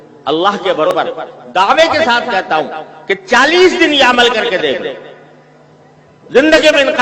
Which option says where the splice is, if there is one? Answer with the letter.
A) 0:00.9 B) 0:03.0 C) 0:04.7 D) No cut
A